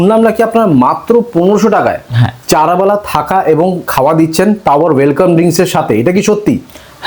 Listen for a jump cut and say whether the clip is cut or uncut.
uncut